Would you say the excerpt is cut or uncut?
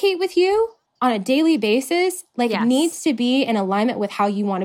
uncut